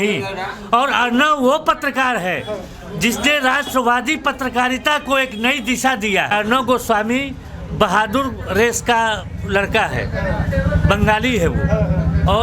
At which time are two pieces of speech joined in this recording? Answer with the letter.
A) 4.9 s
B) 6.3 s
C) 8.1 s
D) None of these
B